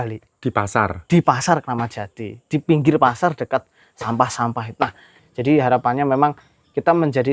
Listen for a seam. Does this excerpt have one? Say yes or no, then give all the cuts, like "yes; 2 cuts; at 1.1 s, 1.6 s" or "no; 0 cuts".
yes; 1 cut; at 5.2 s